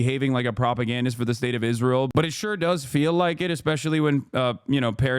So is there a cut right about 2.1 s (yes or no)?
yes